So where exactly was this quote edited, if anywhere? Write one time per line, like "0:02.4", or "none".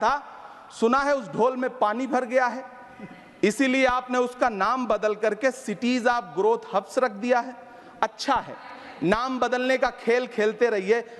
none